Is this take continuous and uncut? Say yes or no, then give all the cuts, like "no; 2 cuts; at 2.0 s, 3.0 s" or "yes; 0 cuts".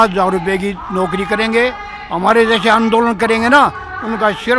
yes; 0 cuts